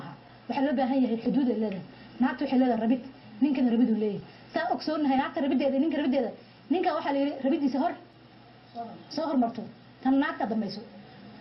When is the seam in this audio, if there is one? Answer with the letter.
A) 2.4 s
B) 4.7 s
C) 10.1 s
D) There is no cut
B